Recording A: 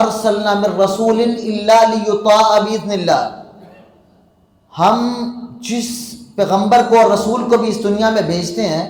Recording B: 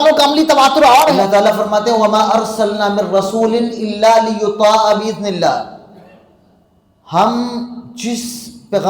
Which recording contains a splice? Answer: B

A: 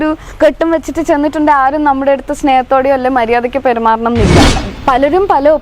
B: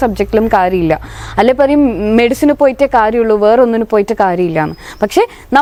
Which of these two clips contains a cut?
A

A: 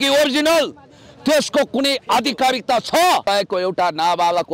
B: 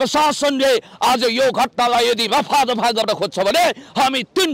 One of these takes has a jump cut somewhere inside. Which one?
A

